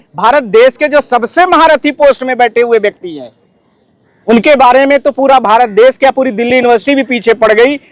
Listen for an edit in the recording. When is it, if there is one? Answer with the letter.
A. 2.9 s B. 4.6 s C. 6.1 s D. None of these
D